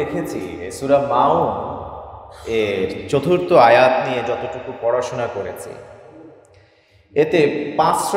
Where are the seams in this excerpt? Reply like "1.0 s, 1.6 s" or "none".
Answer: none